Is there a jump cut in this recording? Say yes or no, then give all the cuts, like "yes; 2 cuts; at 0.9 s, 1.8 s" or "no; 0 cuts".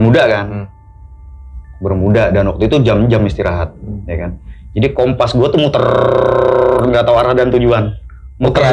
no; 0 cuts